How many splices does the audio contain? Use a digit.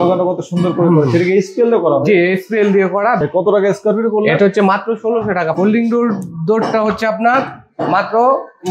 2